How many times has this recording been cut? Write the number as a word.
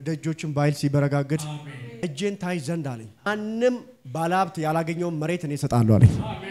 two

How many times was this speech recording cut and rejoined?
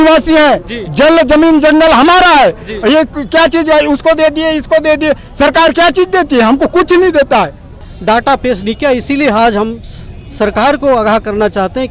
one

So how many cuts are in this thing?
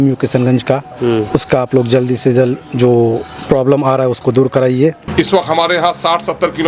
one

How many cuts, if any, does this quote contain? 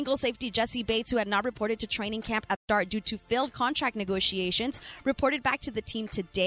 one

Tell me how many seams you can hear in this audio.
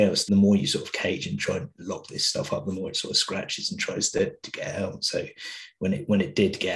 zero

